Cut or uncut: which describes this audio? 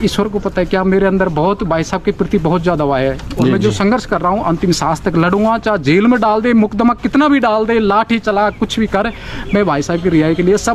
uncut